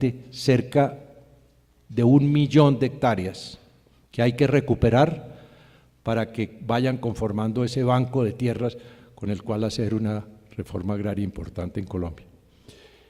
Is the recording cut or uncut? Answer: uncut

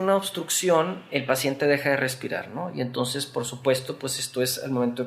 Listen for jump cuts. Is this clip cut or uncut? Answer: cut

